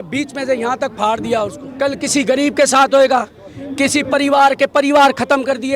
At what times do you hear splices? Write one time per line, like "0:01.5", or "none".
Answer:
0:01.6